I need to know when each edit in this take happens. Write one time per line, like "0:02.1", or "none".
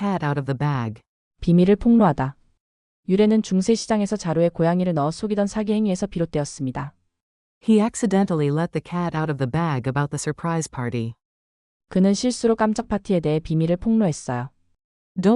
0:01.1